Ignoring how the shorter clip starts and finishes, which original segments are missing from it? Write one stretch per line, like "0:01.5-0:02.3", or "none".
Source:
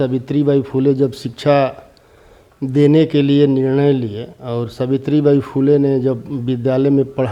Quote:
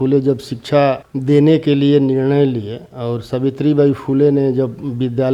0:01.8-0:02.6